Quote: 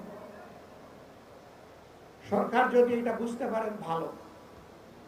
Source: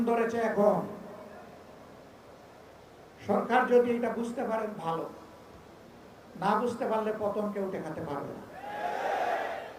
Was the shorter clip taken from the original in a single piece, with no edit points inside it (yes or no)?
yes